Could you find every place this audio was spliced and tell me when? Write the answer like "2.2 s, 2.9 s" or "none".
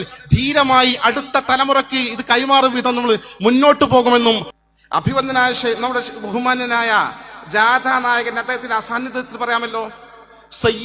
4.5 s